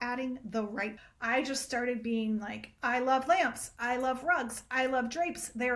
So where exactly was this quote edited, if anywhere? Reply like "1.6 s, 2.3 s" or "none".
1.1 s